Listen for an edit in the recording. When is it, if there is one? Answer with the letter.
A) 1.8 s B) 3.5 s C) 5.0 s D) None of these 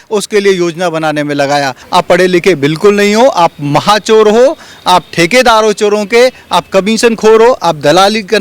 A